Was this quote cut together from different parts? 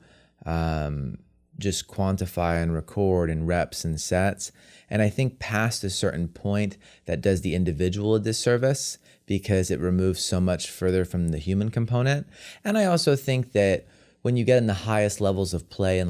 no; 0 cuts

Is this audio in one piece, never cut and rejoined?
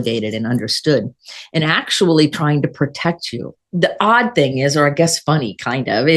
no; 1 cut; at 3.6 s

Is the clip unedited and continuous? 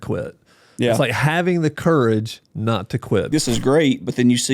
no; 1 cut; at 3.3 s

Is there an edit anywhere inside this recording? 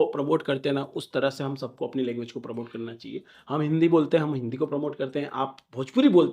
no; 0 cuts

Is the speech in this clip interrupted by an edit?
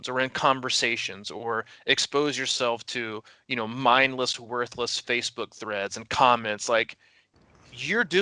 no; 0 cuts

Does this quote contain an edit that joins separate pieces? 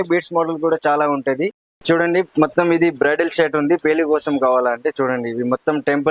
yes; 1 cut; at 1.7 s

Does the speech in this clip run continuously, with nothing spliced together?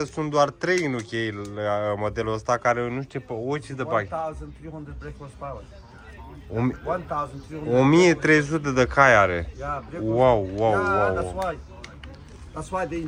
yes; 0 cuts

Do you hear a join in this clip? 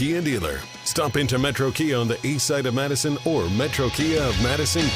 no; 0 cuts

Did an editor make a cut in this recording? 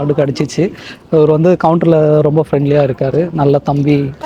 no; 0 cuts

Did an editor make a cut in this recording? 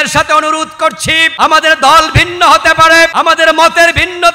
yes; 2 cuts; at 1.3 s, 3.1 s

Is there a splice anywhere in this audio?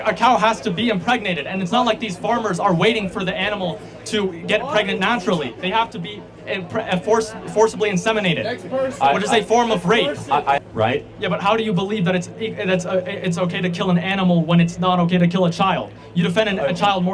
yes; 1 cut; at 10.6 s

